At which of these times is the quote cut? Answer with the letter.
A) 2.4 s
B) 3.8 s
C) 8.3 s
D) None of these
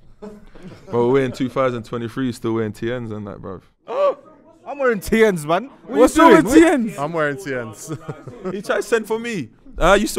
C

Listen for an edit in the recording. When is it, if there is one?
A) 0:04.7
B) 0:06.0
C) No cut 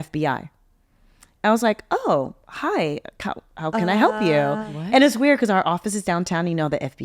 C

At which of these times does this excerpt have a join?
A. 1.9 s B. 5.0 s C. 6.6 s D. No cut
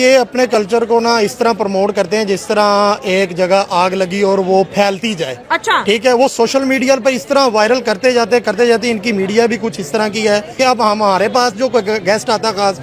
D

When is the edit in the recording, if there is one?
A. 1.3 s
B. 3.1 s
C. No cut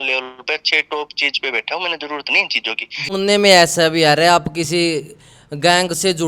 B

